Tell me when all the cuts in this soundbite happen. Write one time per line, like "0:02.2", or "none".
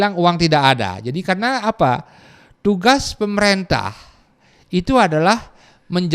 none